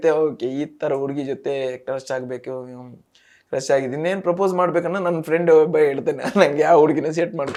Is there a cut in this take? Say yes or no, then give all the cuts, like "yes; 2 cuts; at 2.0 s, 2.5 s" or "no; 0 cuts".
no; 0 cuts